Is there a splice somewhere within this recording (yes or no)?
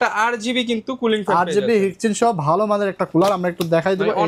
no